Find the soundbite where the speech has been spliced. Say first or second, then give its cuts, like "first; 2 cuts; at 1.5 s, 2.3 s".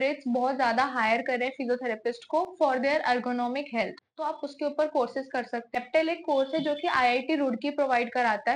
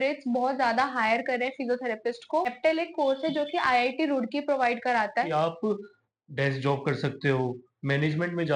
second; 2 cuts; at 2.5 s, 5.3 s